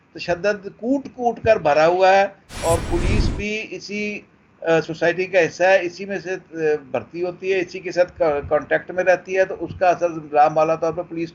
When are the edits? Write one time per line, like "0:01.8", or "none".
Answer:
none